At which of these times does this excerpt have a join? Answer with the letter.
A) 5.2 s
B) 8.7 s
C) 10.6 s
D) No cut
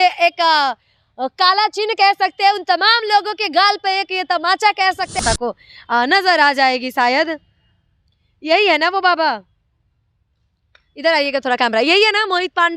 A